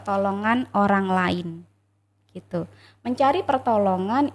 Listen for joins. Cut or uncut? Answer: uncut